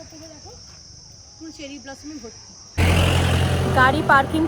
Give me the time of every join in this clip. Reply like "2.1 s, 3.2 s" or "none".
2.5 s